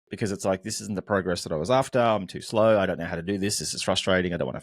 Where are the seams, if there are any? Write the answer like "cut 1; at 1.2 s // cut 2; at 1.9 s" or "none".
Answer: none